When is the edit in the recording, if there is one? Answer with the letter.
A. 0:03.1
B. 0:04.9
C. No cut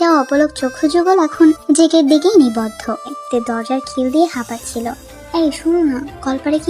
A